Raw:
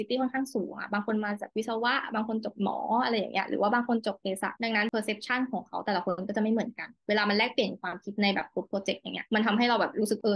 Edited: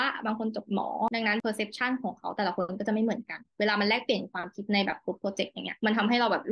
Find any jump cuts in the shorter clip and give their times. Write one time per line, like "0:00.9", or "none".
0:01.1